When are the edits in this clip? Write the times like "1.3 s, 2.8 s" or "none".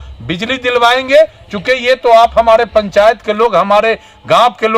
none

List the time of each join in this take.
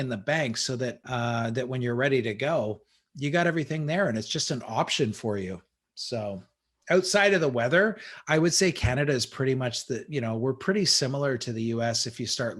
1.0 s

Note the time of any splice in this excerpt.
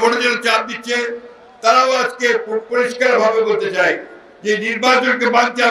none

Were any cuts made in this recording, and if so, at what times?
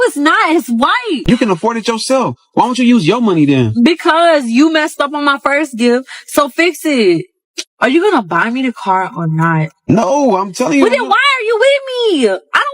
1.2 s

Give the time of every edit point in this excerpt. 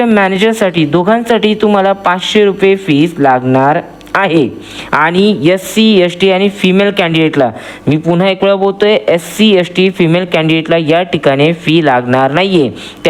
none

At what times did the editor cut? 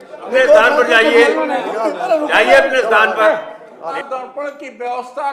3.9 s

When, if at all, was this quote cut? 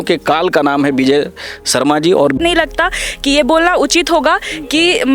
2.4 s

